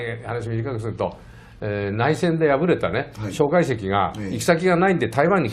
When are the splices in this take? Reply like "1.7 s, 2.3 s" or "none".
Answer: none